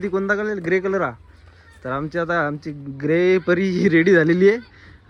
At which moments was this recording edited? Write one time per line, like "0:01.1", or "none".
none